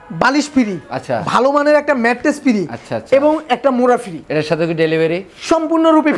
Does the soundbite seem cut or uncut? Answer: uncut